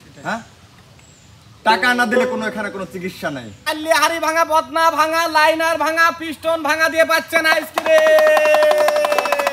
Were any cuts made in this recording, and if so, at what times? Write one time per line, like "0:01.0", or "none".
0:03.7